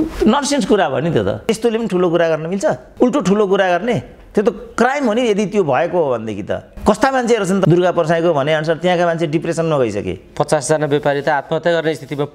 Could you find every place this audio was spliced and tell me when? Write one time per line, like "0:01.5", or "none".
0:01.4
0:02.8
0:07.7

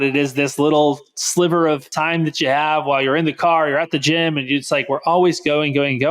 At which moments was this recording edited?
0:01.9

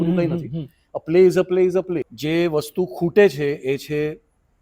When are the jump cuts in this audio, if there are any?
0:02.1

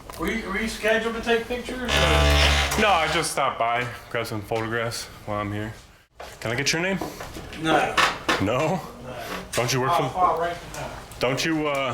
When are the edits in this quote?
0:06.3

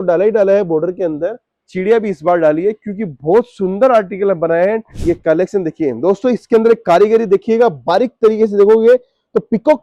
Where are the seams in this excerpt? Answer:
0:04.9

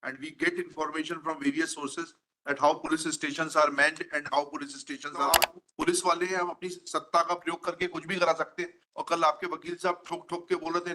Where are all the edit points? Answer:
0:05.3

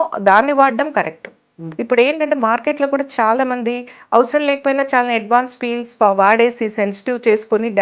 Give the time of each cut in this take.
none

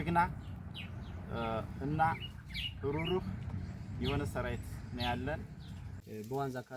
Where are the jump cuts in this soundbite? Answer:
0:05.8

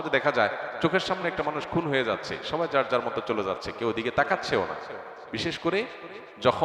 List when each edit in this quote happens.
0:05.3

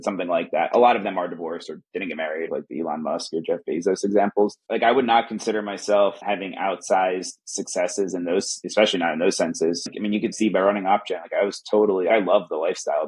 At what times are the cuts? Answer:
0:02.5
0:04.6
0:08.6
0:09.8
0:12.1

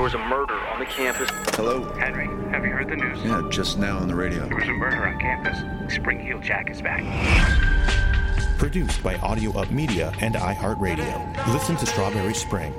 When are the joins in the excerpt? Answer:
none

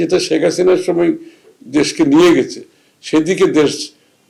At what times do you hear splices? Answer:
none

